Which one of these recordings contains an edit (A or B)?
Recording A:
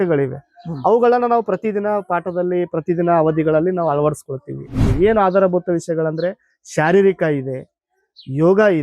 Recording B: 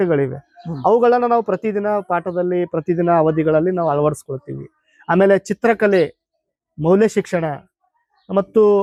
A